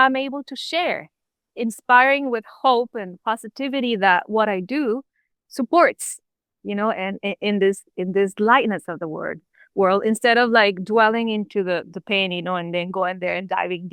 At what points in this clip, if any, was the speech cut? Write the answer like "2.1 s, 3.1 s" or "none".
none